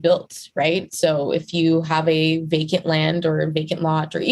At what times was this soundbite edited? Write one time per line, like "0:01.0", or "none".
none